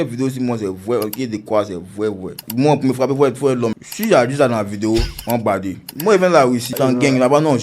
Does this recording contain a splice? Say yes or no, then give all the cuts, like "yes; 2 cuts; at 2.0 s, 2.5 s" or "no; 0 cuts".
yes; 3 cuts; at 2.4 s, 5.9 s, 6.7 s